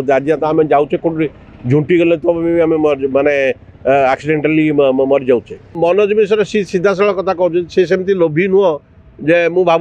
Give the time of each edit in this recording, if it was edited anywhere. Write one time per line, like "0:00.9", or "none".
0:05.8